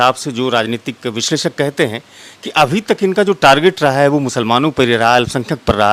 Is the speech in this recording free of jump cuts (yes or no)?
yes